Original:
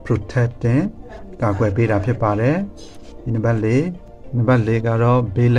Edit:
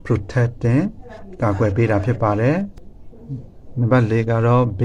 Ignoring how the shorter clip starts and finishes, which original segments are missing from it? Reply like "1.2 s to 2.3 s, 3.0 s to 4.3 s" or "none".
3.3 s to 3.9 s